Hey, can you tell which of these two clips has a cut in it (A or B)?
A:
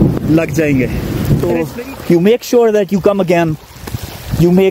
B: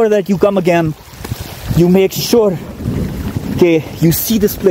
A